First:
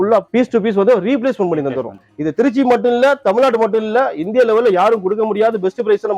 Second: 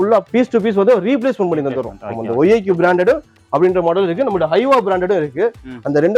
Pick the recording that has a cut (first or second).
first